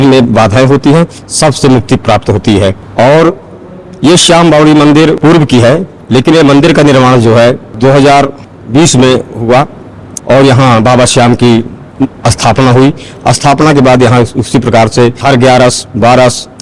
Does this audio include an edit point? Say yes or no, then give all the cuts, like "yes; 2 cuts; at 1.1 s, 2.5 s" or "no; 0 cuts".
no; 0 cuts